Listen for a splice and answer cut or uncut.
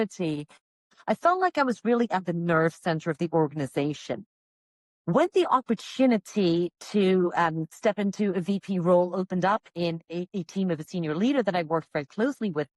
cut